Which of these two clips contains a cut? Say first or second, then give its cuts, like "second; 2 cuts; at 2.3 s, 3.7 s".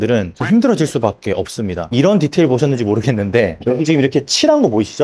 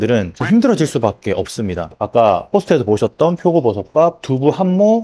first; 1 cut; at 1.8 s